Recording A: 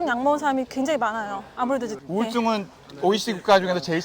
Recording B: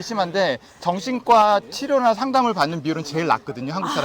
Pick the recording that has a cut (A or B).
A